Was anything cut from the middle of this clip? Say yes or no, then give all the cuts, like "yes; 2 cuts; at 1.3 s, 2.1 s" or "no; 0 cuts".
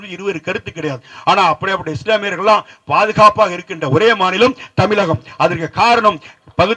no; 0 cuts